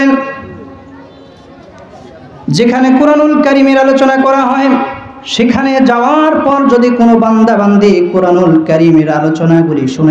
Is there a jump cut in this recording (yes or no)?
no